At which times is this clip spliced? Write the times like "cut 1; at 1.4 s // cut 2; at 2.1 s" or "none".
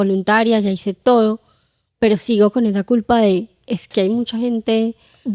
none